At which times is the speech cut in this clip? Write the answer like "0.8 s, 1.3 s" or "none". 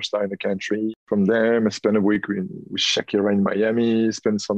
1.0 s